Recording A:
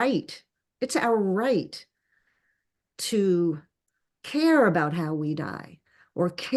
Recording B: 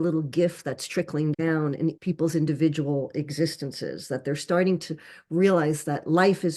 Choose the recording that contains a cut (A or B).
B